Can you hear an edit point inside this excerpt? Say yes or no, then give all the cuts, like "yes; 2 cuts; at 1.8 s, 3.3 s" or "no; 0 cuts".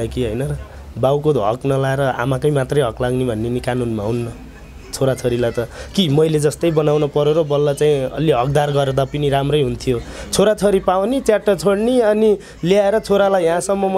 no; 0 cuts